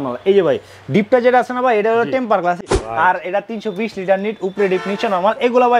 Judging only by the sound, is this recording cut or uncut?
cut